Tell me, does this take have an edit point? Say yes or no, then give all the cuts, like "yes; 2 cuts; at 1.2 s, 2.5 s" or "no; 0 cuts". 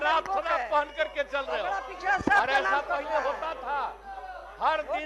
no; 0 cuts